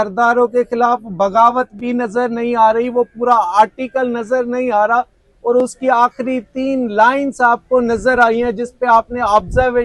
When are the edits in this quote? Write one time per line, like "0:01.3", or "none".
none